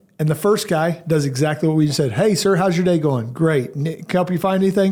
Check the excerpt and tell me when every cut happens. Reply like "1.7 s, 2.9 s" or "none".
none